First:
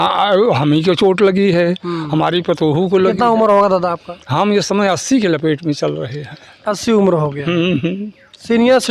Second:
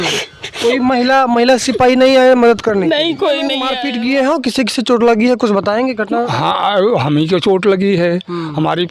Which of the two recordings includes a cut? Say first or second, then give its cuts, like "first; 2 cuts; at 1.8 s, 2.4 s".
second; 1 cut; at 3.7 s